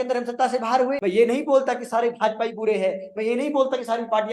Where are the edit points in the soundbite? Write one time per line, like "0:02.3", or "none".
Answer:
0:01.0